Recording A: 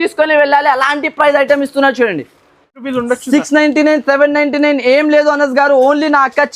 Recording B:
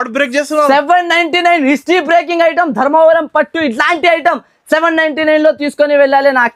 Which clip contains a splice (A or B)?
A